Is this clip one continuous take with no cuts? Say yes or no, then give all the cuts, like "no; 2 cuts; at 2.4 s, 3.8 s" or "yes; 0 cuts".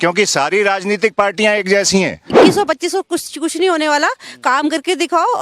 no; 1 cut; at 2.4 s